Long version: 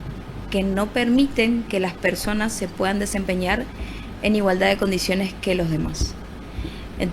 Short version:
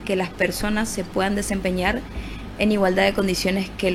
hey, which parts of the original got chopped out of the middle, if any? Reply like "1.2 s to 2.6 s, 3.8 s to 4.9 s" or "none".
none